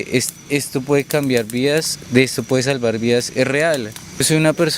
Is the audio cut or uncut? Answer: uncut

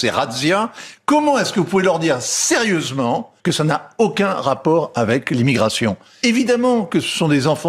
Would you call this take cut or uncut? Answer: cut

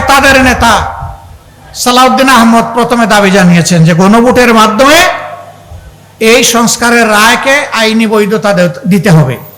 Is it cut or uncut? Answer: uncut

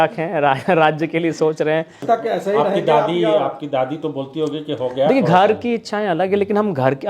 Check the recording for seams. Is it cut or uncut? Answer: cut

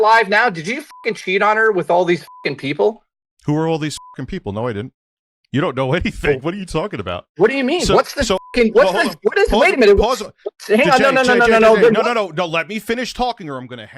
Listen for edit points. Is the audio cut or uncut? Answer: uncut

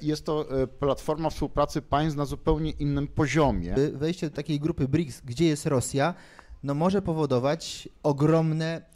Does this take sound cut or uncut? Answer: cut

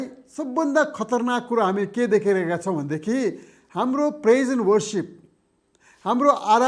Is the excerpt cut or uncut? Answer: uncut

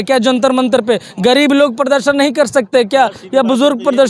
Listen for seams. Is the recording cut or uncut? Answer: uncut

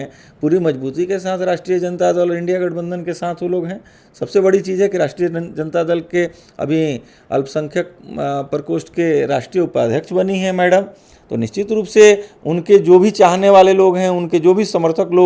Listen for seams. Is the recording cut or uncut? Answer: uncut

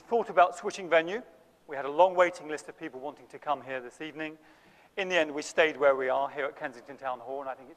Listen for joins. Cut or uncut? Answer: cut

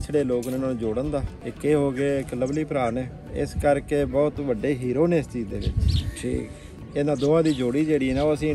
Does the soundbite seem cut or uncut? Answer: cut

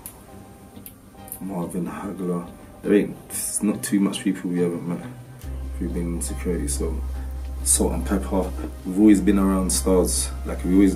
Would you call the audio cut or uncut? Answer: uncut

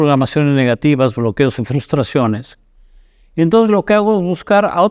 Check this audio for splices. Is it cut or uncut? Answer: uncut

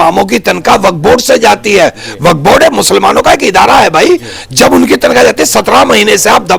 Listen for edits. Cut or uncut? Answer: uncut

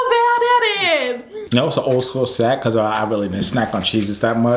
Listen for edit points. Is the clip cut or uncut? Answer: cut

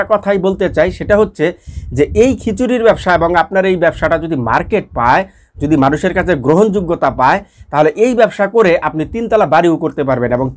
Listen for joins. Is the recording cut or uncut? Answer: uncut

